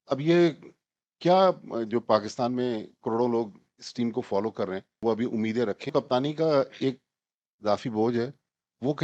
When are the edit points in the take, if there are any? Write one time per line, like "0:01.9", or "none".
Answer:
0:04.9
0:05.9